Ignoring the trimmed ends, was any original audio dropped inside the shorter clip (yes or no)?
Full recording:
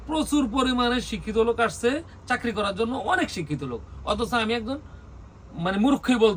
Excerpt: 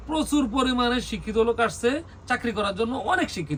no